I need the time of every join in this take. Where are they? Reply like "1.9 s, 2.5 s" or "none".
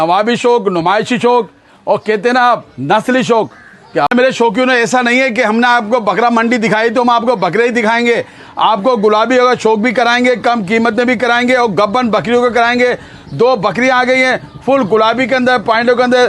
4.0 s